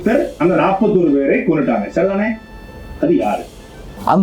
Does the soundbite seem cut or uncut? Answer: uncut